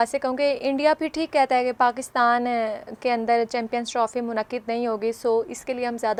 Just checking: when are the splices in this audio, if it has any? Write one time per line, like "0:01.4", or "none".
none

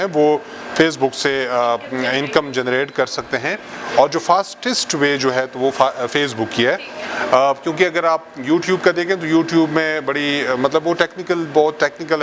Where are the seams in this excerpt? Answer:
none

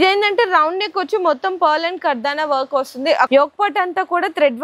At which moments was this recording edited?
0:03.3

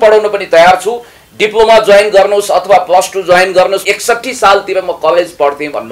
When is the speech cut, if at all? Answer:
0:03.9

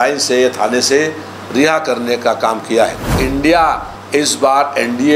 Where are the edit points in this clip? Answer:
0:03.2

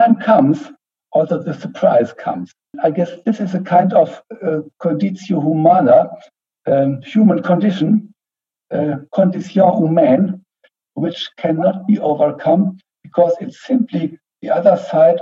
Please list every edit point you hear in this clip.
0:02.7

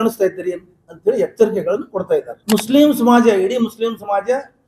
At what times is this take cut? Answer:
0:02.3

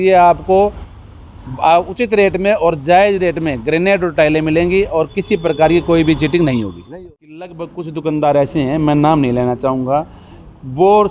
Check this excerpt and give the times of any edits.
0:06.8

